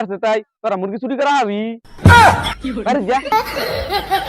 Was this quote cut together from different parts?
yes; 1 cut; at 3.3 s

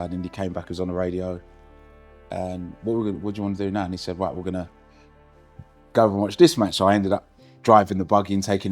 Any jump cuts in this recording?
no; 0 cuts

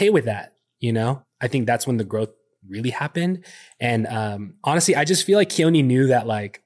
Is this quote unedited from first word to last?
no; 1 cut; at 1.2 s

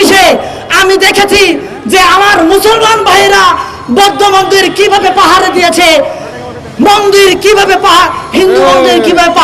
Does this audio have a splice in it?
no; 0 cuts

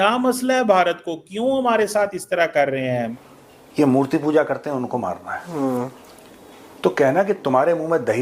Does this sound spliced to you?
yes; 1 cut; at 3.1 s

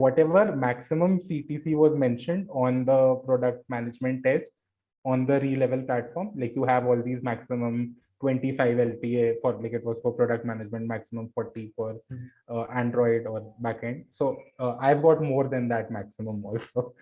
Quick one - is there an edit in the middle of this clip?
no; 0 cuts

